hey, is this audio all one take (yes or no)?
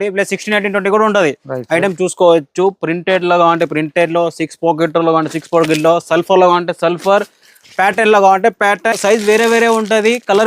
no